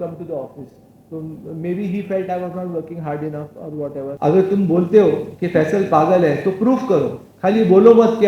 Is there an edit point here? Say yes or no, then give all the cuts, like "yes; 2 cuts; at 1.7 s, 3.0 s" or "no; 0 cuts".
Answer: yes; 1 cut; at 4.1 s